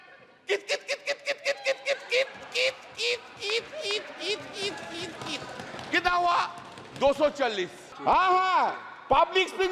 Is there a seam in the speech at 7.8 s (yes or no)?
yes